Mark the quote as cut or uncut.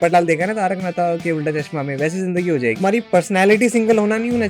cut